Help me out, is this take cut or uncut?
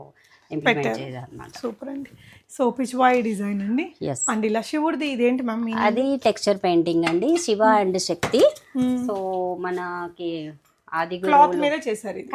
uncut